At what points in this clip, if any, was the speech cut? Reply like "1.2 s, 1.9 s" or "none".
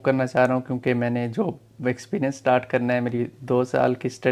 none